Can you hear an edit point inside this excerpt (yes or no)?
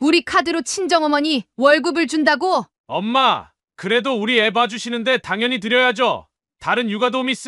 yes